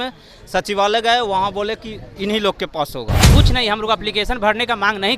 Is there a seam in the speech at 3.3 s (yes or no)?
yes